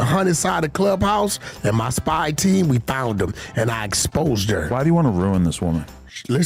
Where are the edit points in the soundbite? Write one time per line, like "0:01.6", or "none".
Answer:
none